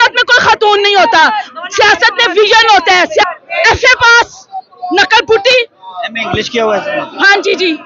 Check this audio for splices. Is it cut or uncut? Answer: cut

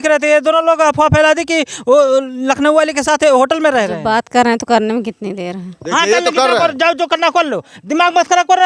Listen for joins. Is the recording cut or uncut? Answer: cut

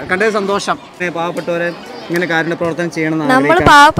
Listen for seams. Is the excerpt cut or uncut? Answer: cut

